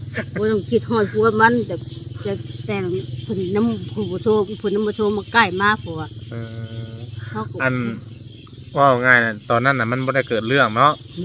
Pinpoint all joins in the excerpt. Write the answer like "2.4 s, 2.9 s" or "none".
none